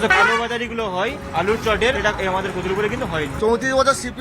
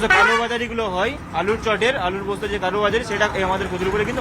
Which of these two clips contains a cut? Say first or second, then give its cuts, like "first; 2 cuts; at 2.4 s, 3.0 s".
first; 2 cuts; at 2.0 s, 3.3 s